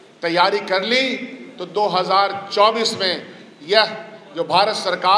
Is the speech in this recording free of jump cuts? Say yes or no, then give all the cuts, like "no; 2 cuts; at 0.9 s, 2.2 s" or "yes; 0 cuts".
yes; 0 cuts